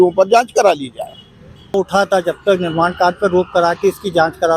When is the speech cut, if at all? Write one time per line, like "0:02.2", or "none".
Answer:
0:01.7